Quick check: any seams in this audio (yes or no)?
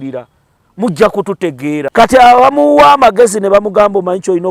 yes